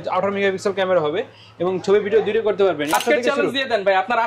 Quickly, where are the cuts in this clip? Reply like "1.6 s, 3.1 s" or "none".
2.9 s